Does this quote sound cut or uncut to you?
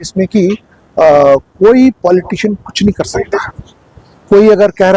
uncut